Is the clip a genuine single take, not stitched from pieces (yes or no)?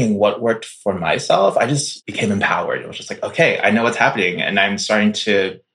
no